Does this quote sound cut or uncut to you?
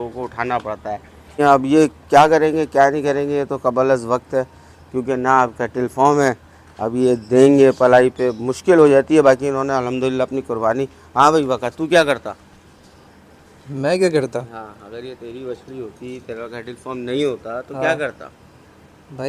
uncut